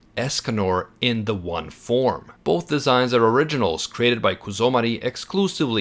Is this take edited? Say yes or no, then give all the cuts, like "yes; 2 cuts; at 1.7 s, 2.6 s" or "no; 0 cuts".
yes; 1 cut; at 2.3 s